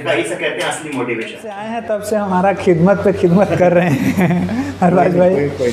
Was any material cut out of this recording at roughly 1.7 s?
yes; 1 cut; at 1.7 s

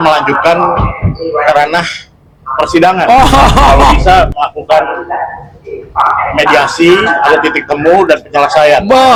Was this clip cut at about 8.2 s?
no; 0 cuts

